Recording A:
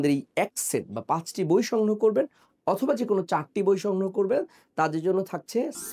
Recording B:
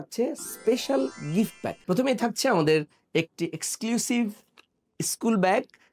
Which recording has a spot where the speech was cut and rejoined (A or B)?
B